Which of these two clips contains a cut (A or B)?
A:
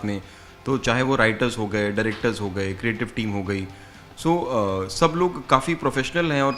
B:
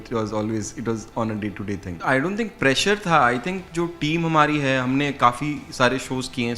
B